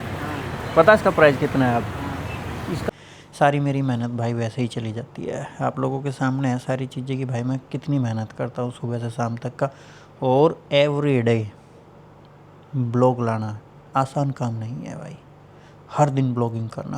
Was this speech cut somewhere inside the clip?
yes; 1 cut; at 2.9 s

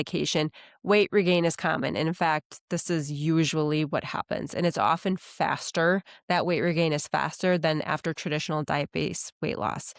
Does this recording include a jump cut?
no; 0 cuts

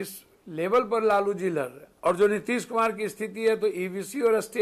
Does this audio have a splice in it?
yes; 1 cut; at 1.8 s

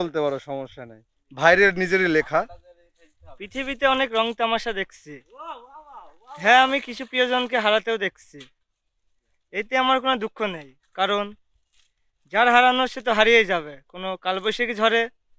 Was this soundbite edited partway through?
no; 0 cuts

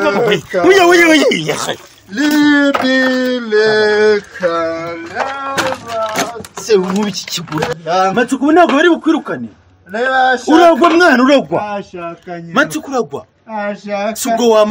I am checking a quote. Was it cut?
yes; 1 cut; at 7.7 s

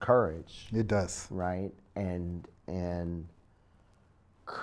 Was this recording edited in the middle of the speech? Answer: no; 0 cuts

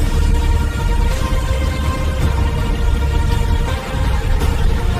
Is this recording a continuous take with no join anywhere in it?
yes; 0 cuts

